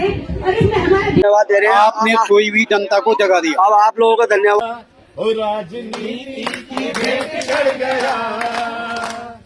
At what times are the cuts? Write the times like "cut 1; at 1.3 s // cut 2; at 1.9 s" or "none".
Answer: cut 1; at 1.2 s // cut 2; at 4.6 s